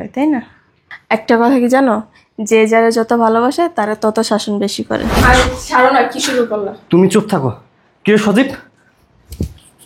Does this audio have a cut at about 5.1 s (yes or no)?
yes